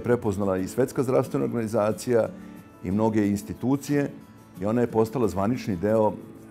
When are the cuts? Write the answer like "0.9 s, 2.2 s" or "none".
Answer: none